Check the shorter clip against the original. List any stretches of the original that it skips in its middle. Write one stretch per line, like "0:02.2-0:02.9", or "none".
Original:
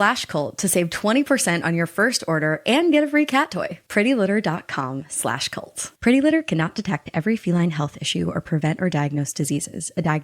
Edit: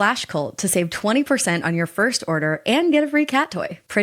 none